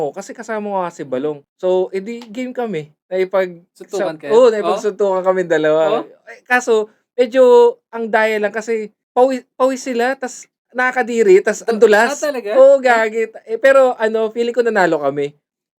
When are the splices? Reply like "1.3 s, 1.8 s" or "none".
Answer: 1.5 s, 9.0 s